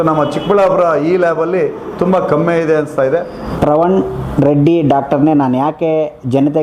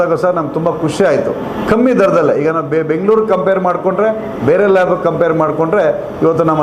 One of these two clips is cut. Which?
first; 1 cut; at 3.4 s

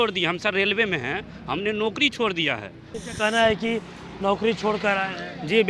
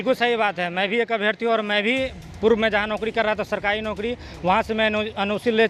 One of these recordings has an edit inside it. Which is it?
first; 1 cut; at 2.9 s

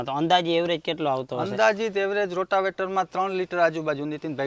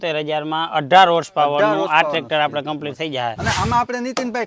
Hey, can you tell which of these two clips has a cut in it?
second; 1 cut; at 3.4 s

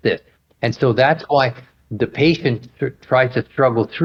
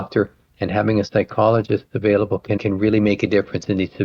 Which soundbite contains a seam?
second; 1 cut; at 2.6 s

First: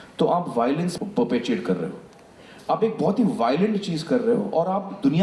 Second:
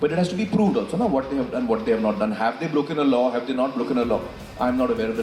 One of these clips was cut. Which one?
first; 1 cut; at 0.9 s

